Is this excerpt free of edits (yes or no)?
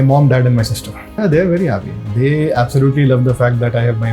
no